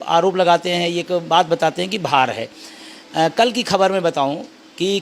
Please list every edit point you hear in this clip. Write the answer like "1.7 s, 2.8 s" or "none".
none